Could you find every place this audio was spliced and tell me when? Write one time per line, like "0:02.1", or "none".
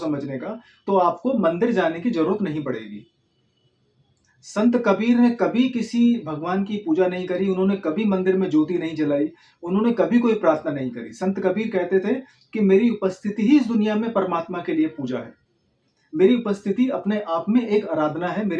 none